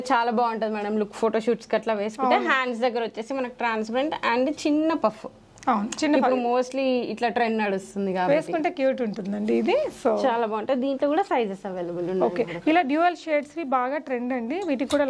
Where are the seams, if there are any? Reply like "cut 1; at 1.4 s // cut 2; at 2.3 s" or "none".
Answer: none